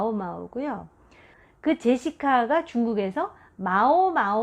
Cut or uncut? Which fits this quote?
cut